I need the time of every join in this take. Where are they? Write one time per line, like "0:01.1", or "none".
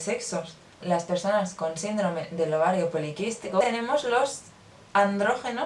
0:00.8
0:03.6